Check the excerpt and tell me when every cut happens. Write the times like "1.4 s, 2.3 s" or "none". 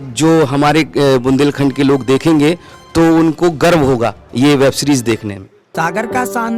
5.6 s